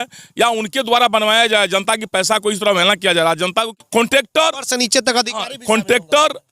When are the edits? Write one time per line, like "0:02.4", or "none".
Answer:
0:03.8